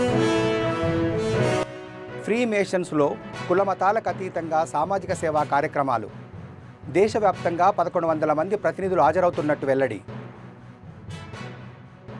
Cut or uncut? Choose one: cut